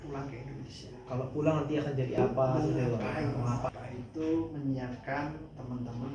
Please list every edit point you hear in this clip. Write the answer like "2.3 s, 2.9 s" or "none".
3.7 s